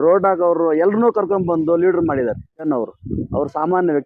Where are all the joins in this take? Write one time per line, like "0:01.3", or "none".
0:02.6